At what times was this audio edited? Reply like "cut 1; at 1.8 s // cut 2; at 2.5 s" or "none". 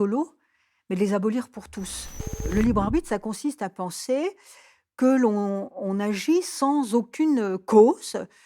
cut 1; at 2.5 s